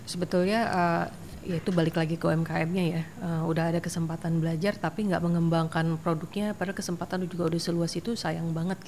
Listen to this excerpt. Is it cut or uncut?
uncut